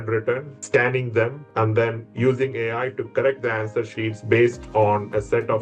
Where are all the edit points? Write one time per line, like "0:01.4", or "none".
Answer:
none